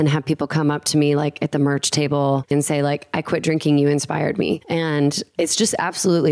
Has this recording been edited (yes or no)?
yes